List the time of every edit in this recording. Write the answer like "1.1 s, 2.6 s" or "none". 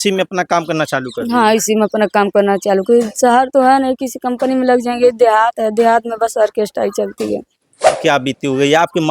8.0 s